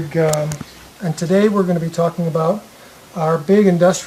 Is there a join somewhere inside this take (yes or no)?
no